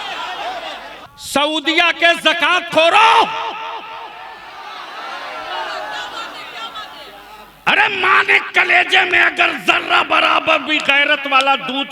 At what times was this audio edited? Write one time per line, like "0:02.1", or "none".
0:01.0